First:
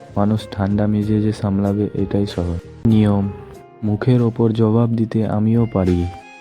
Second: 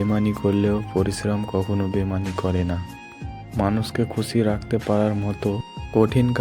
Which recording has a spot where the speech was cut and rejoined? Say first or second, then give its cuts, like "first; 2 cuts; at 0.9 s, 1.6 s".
first; 1 cut; at 2.9 s